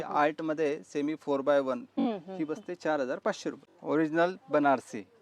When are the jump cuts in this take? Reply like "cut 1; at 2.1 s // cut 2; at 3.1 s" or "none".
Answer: cut 1; at 1.9 s // cut 2; at 3.7 s